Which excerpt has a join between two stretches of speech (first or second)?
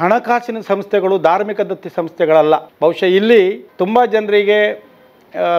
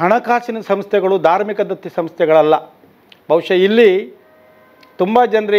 first